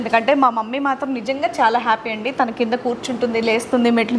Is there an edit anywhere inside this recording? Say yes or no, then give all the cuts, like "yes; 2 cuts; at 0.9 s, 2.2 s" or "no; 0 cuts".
no; 0 cuts